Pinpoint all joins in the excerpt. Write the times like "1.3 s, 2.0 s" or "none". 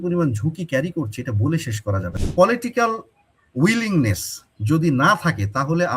2.2 s